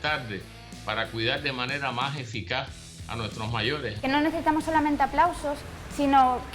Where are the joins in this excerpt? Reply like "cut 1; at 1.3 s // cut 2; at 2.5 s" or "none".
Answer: cut 1; at 3.9 s